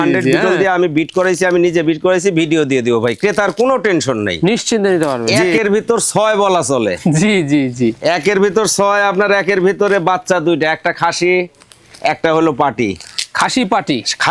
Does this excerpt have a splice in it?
yes; 1 cut; at 5.5 s

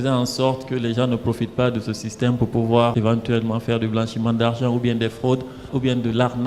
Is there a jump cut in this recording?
yes; 2 cuts; at 2.9 s, 5.7 s

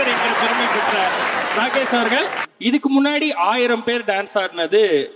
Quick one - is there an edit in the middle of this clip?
yes; 1 cut; at 2.5 s

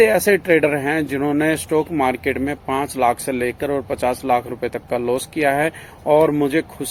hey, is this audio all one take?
yes; 0 cuts

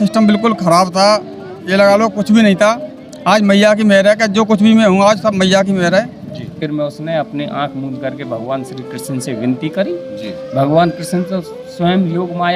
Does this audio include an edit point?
yes; 1 cut; at 6.6 s

